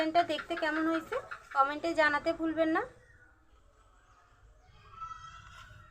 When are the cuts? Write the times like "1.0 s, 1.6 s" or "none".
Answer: 3.4 s, 5.0 s

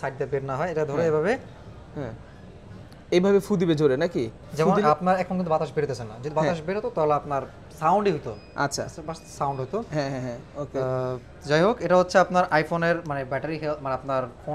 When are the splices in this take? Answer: none

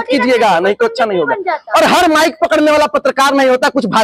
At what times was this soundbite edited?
none

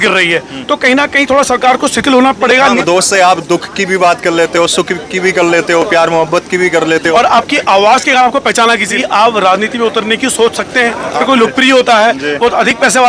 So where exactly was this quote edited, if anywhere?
2.8 s, 7.1 s, 8.9 s, 11.2 s

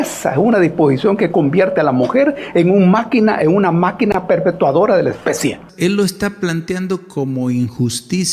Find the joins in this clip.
5.7 s

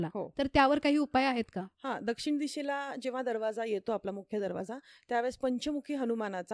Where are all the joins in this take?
none

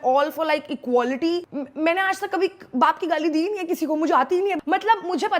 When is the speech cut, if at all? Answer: 1.5 s, 4.6 s

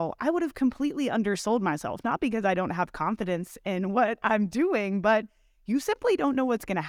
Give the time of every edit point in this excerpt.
none

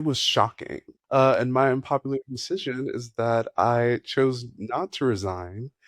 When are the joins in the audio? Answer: 1.2 s

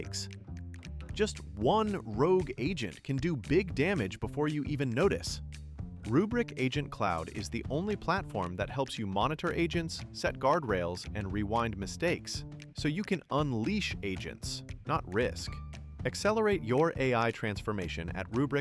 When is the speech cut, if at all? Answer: none

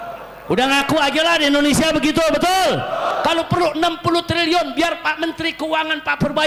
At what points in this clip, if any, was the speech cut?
3.1 s

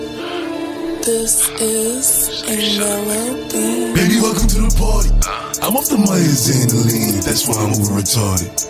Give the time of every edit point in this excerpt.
1.0 s

